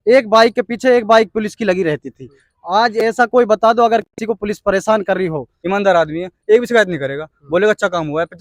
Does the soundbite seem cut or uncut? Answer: cut